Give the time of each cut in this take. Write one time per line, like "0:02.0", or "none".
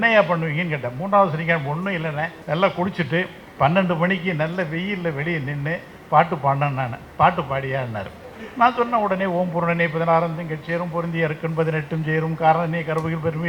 0:02.4